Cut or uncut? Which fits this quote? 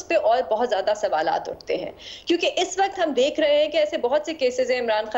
uncut